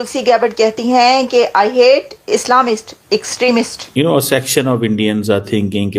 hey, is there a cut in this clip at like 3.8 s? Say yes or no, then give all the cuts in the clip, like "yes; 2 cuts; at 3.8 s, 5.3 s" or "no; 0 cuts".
yes; 1 cut; at 3.8 s